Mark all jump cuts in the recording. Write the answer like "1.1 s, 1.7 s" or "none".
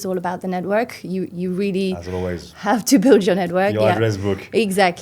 none